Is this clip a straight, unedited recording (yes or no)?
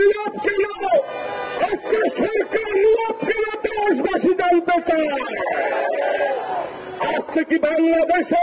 yes